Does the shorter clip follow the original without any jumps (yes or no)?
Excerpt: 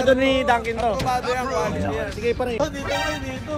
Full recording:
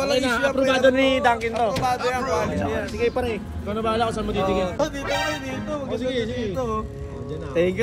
no